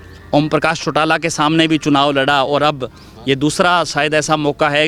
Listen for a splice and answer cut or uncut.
uncut